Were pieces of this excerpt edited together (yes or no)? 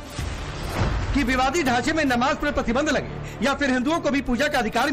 yes